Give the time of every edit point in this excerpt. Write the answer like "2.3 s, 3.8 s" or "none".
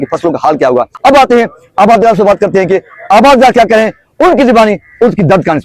none